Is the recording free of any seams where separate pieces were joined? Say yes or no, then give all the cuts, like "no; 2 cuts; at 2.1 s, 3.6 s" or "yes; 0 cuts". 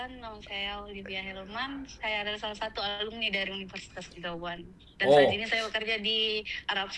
yes; 0 cuts